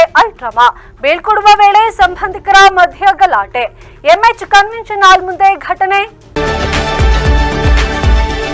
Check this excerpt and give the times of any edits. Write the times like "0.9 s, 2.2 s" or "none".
6.2 s